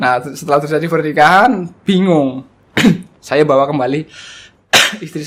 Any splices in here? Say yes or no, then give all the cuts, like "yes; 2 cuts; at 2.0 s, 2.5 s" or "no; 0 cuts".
no; 0 cuts